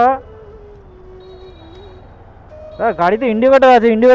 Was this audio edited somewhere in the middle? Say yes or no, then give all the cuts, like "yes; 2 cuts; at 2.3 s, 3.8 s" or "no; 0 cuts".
no; 0 cuts